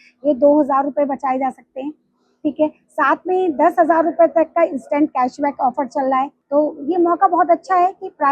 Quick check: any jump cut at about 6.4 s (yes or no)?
yes